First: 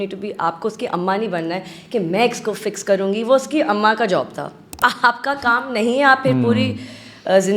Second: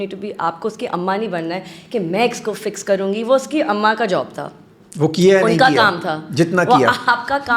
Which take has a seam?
first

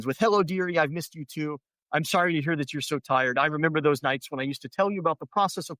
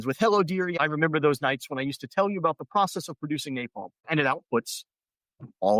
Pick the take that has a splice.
second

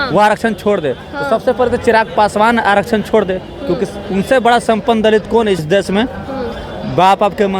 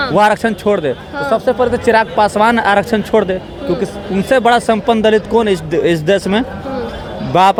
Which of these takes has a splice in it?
first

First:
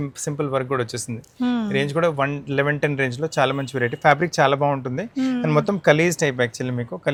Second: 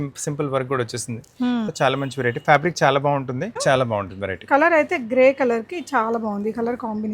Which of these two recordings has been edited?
second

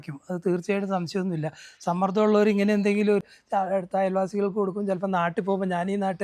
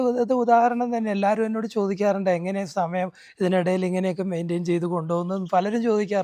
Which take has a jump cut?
first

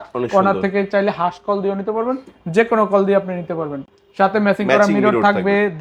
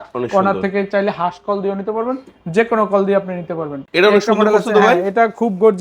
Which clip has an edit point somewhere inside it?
second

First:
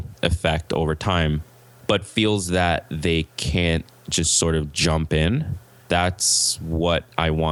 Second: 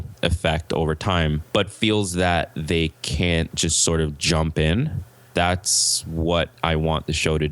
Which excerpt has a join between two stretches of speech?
second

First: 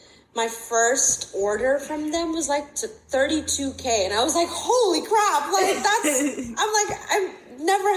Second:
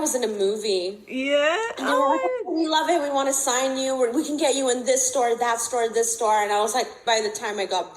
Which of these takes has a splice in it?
second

